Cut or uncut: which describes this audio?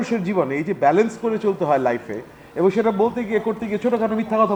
uncut